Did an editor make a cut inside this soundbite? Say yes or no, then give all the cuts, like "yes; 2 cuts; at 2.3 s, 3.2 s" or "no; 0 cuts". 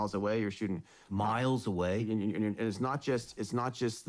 no; 0 cuts